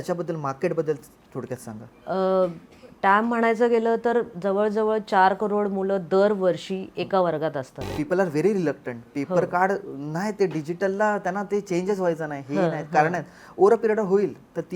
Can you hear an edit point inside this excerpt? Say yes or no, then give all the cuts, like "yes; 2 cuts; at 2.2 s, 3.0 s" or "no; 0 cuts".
yes; 1 cut; at 7.9 s